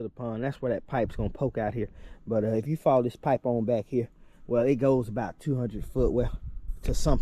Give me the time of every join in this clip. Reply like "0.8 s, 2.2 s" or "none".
none